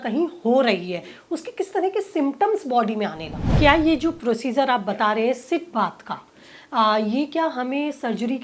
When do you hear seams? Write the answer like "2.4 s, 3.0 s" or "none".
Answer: 3.4 s